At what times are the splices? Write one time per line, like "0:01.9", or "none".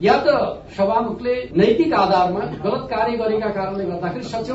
none